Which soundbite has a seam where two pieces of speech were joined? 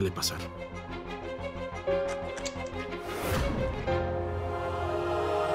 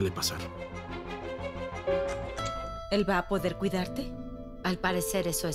second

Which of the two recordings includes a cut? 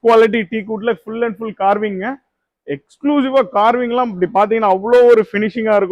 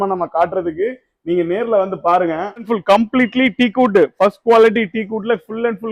second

